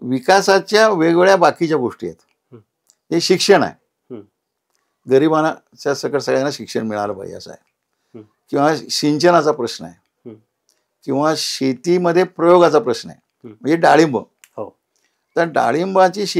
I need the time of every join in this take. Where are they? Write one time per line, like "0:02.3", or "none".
none